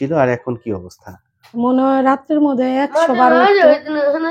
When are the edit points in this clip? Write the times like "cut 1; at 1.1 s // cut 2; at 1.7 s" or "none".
cut 1; at 1.5 s